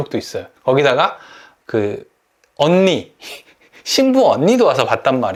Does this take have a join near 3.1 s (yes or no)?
no